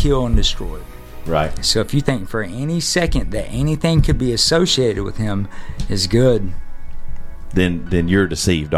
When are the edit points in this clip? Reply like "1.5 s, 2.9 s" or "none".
none